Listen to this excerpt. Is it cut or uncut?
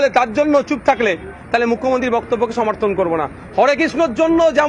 uncut